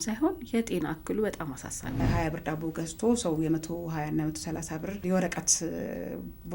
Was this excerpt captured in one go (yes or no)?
no